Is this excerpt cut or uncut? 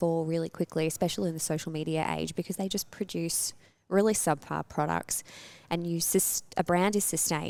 uncut